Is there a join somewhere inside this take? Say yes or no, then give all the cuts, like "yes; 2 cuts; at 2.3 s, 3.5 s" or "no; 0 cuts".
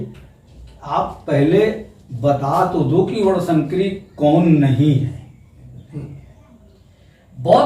yes; 1 cut; at 5.8 s